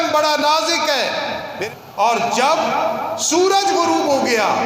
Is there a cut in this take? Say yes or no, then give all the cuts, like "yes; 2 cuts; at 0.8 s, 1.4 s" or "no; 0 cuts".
yes; 1 cut; at 1.5 s